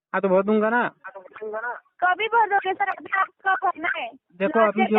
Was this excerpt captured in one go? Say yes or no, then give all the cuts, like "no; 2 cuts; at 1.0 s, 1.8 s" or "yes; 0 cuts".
yes; 0 cuts